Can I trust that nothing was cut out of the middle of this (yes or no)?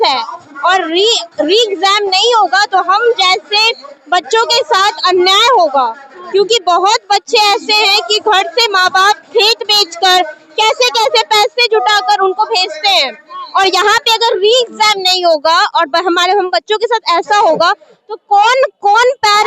yes